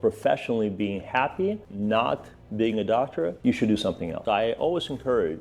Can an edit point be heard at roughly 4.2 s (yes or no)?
yes